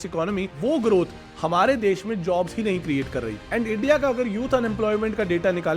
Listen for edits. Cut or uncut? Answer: cut